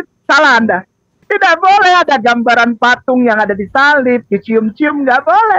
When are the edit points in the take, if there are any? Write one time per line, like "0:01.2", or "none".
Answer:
0:01.3